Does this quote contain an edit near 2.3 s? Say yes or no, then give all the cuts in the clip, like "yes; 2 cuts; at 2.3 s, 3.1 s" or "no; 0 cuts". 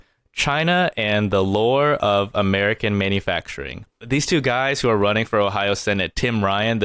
no; 1 cut; at 4.0 s